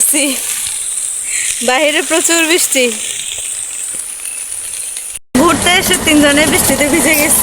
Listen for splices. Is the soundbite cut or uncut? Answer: cut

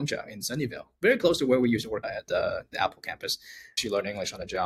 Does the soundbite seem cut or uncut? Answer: uncut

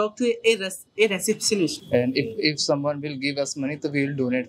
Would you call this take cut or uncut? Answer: cut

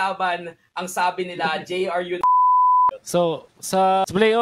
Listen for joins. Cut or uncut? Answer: uncut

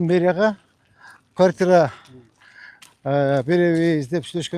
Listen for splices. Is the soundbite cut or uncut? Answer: uncut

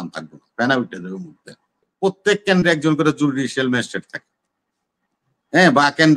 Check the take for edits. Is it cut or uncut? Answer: cut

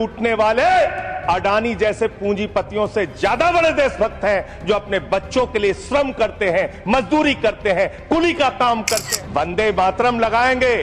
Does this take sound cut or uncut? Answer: cut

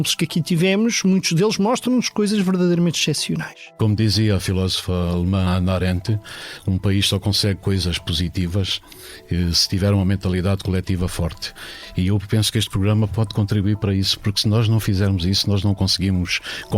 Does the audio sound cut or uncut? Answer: cut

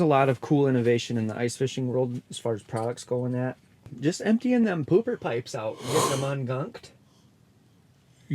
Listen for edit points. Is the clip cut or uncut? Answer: cut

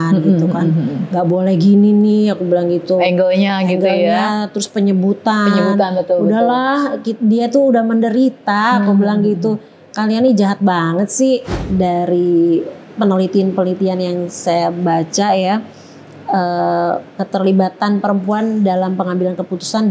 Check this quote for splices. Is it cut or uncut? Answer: cut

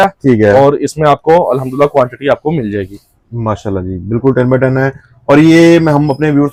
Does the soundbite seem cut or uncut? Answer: uncut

